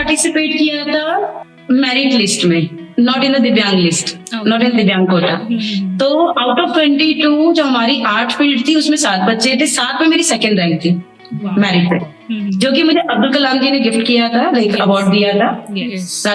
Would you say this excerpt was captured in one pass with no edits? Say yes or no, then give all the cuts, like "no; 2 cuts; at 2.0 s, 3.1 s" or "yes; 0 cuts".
no; 1 cut; at 1.5 s